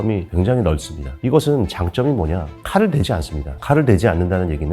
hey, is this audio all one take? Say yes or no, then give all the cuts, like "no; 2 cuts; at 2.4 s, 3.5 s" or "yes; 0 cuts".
no; 1 cut; at 1.1 s